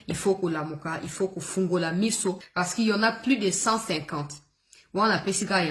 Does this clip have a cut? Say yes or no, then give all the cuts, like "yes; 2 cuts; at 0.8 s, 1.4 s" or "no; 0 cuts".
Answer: yes; 1 cut; at 2.4 s